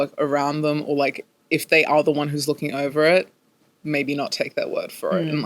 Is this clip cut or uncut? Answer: uncut